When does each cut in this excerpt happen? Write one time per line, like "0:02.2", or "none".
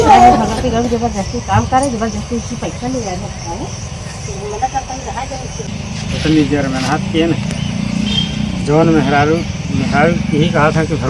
0:05.7